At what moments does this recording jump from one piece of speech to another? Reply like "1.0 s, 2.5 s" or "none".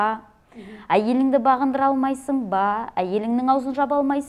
none